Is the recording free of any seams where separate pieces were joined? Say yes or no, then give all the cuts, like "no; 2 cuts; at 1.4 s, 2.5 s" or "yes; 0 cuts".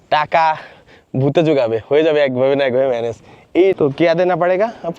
no; 1 cut; at 3.7 s